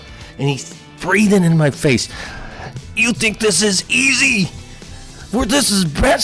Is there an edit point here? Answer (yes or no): yes